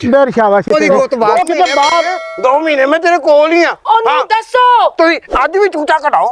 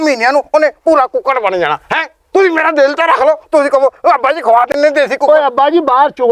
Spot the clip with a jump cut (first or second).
first